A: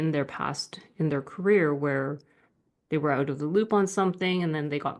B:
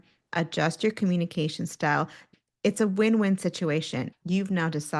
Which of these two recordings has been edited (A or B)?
B